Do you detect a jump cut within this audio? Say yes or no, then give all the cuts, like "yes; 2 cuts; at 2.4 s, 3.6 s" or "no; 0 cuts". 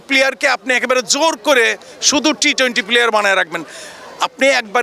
no; 0 cuts